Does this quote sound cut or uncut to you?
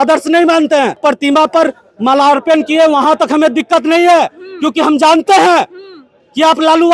cut